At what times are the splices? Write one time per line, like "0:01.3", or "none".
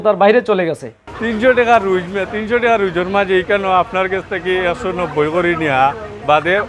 0:01.1